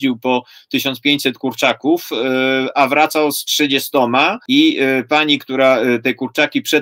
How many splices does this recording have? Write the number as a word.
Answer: one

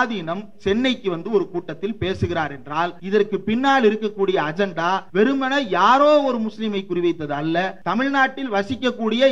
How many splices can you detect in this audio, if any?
three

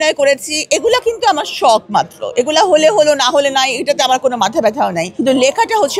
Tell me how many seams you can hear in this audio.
one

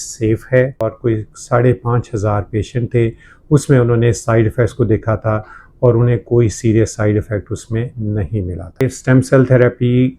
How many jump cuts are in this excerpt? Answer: two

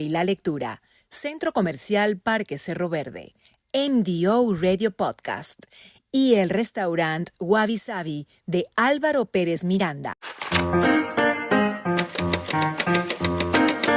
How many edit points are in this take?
one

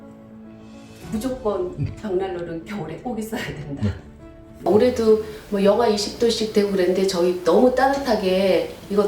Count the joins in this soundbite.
one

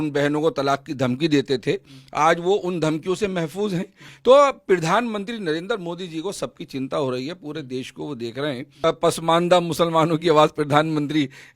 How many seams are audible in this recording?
one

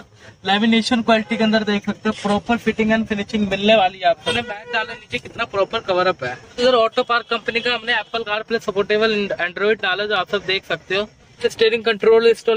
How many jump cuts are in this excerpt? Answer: three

